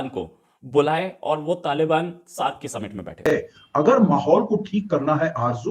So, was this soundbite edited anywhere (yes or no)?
yes